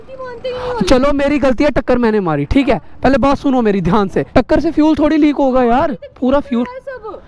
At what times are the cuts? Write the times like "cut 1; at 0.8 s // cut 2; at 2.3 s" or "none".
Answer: cut 1; at 4.3 s